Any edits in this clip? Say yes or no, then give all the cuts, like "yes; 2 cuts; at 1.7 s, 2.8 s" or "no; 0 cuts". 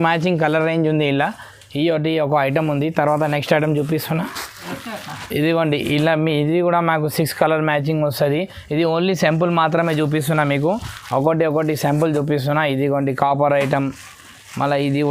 no; 0 cuts